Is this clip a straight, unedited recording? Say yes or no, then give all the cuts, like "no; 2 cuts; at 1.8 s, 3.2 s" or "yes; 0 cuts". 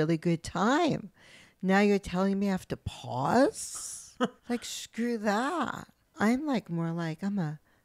no; 1 cut; at 4.4 s